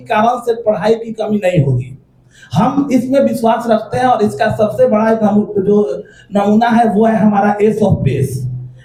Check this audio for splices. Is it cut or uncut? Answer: uncut